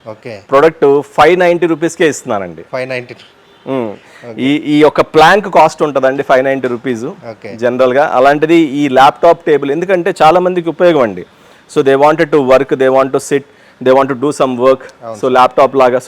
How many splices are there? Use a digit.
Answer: 0